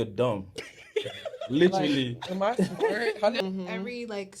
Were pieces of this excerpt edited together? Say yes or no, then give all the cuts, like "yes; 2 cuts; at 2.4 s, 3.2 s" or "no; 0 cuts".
yes; 1 cut; at 3.4 s